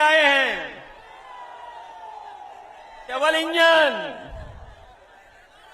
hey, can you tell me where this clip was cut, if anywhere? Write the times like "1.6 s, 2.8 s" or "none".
3.1 s